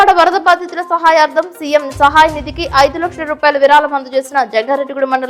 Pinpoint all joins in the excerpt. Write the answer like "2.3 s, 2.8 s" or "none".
none